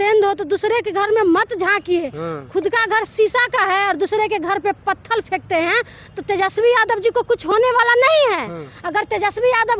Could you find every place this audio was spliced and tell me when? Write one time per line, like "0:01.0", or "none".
none